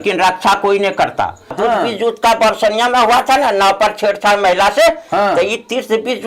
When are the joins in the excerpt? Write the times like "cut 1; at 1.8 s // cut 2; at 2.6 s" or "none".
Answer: cut 1; at 1.6 s